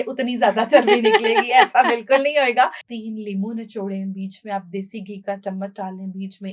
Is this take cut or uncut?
cut